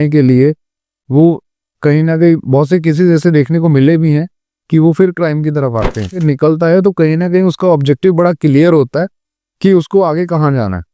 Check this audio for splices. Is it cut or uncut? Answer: cut